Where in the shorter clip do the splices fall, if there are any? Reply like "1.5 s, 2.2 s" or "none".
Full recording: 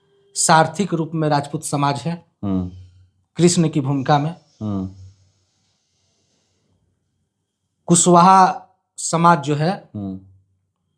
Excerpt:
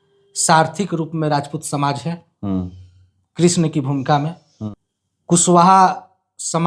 4.5 s